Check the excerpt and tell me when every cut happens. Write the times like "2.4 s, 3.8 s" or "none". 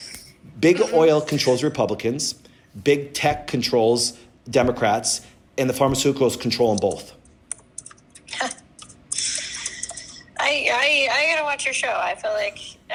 none